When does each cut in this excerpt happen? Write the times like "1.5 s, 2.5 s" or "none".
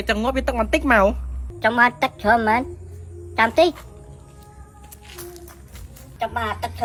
none